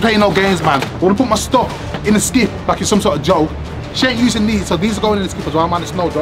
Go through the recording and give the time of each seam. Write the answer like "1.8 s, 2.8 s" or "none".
none